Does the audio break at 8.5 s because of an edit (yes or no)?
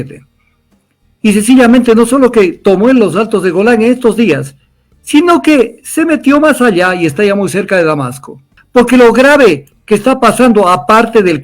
yes